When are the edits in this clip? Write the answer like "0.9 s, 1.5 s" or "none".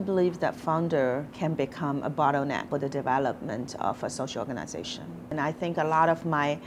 1.3 s, 2.7 s, 5.3 s